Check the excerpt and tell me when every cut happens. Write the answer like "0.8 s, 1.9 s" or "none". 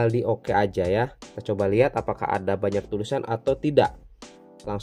none